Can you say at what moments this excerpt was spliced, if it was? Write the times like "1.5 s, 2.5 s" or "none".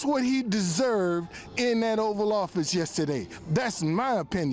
none